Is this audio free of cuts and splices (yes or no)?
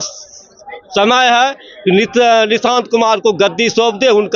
yes